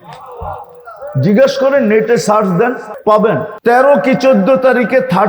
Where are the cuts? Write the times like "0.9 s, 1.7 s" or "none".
2.9 s, 3.5 s